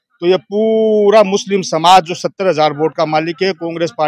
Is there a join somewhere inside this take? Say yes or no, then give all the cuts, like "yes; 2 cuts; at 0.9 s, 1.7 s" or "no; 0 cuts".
no; 0 cuts